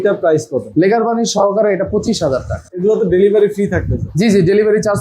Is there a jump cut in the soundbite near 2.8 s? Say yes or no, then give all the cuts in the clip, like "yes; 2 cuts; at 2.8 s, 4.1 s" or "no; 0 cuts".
yes; 1 cut; at 2.8 s